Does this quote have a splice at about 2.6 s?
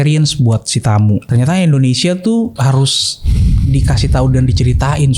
yes; 2 cuts; at 1.3 s, 2.6 s

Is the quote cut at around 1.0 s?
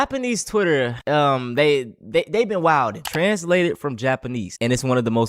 yes; 1 cut; at 1.0 s

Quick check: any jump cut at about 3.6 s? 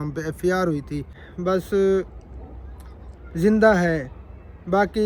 no; 1 cut; at 1.3 s

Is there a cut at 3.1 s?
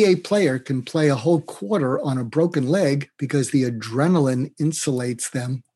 yes; 1 cut; at 3.1 s

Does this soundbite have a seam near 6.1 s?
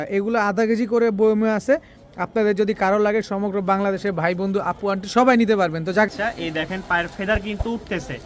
yes; 1 cut; at 6.1 s

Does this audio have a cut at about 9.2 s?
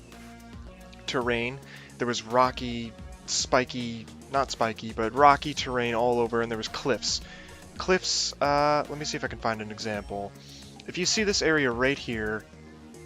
yes; 1 cut; at 9.2 s

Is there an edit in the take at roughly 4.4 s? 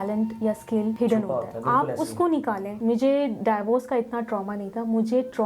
no; 2 cuts; at 1.0 s, 2.7 s

